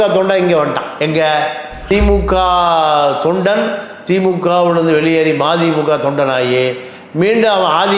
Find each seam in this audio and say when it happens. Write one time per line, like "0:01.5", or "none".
0:01.7